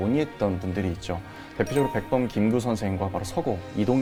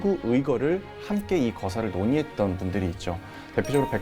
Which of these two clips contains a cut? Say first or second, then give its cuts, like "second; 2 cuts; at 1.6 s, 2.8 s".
second; 1 cut; at 1.0 s